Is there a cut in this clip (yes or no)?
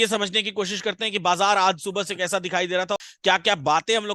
yes